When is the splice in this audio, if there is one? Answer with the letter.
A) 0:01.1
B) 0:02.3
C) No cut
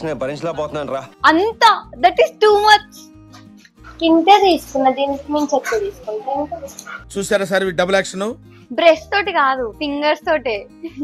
A